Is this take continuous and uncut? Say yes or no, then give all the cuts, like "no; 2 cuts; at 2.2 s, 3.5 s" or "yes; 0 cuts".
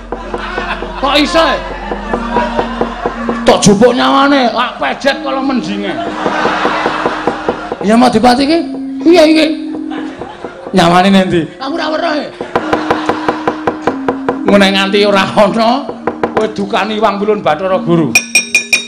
no; 1 cut; at 7.7 s